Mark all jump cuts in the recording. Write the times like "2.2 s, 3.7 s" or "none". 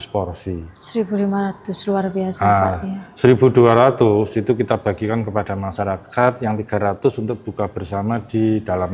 none